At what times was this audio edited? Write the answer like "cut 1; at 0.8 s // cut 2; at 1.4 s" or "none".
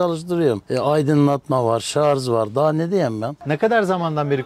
cut 1; at 3.3 s